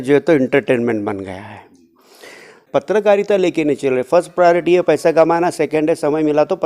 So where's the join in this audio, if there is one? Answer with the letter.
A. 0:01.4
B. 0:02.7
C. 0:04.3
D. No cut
B